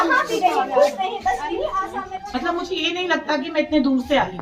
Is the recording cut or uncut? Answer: cut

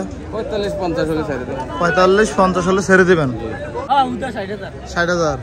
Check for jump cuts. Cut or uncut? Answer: cut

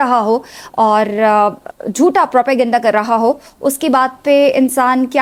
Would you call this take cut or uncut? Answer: uncut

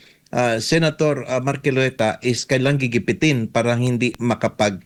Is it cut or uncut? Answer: uncut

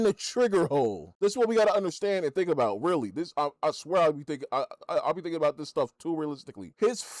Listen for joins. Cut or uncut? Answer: uncut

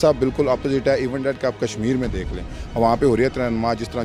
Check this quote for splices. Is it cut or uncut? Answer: uncut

